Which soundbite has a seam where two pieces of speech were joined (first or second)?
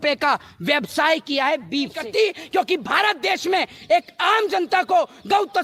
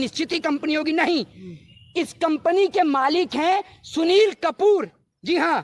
first